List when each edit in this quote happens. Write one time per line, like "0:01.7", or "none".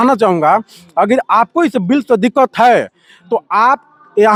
none

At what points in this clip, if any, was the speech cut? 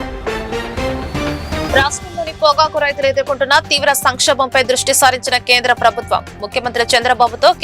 0:01.7

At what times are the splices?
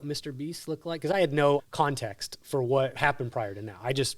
0:01.6
0:02.9

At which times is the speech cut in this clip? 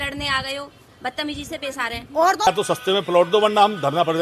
0:02.5

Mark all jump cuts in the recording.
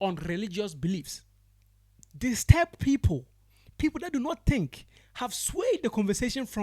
0:02.0

